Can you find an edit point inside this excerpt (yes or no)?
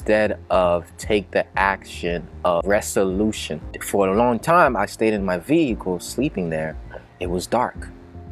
yes